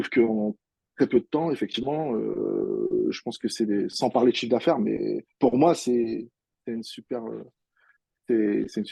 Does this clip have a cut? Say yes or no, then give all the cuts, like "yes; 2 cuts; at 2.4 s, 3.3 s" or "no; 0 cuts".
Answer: no; 0 cuts